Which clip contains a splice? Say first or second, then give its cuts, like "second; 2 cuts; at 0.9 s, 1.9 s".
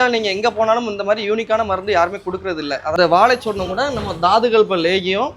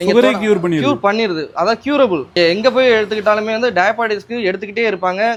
first; 1 cut; at 2.9 s